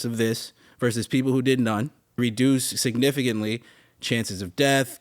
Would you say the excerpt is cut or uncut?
cut